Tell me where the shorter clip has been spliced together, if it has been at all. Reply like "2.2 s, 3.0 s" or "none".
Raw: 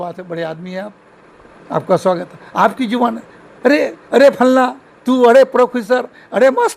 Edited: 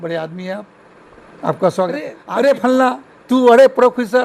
2.2 s